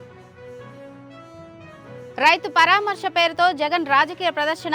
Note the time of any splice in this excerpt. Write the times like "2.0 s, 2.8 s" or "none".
2.1 s